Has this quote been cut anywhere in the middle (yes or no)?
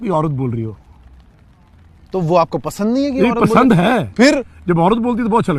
no